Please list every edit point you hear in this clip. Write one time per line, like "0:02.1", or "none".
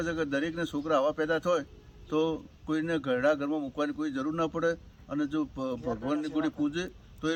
none